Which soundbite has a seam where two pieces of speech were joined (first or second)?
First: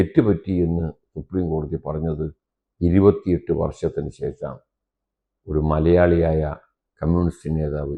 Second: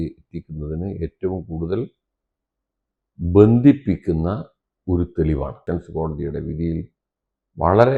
second